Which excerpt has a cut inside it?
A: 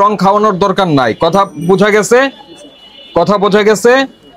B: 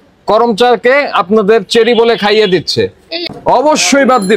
B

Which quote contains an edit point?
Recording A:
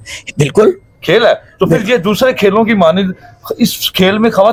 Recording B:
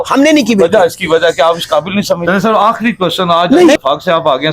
B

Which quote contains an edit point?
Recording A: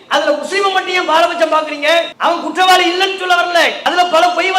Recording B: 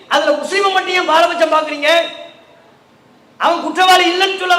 A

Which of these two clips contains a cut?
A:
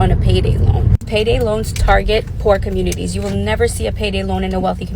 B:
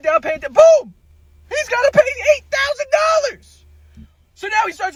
A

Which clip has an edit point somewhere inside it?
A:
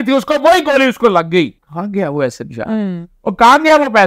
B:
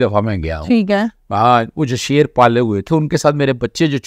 A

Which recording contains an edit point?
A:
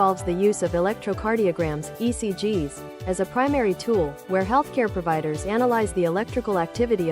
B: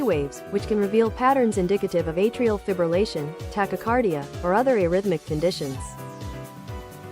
B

